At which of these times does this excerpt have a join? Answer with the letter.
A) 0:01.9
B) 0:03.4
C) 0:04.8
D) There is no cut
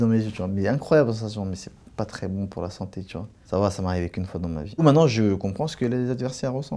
C